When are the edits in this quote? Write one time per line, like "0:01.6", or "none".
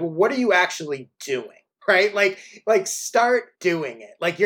0:01.7
0:03.5